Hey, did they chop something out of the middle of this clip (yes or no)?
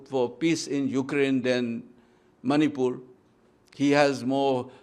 no